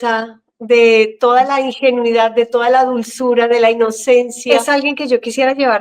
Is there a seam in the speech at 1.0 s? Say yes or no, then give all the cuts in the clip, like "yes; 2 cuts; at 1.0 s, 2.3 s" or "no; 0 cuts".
no; 1 cut; at 4.5 s